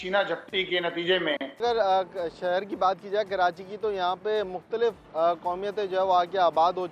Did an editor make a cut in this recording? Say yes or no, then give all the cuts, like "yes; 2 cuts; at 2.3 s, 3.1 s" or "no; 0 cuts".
yes; 1 cut; at 1.6 s